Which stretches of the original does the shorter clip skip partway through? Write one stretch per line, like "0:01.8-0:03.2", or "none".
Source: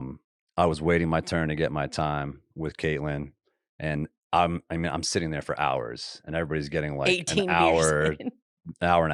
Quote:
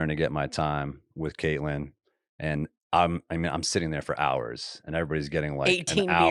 none

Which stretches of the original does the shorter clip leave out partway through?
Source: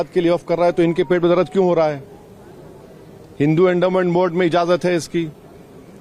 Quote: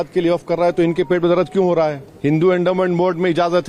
0:02.1-0:03.2

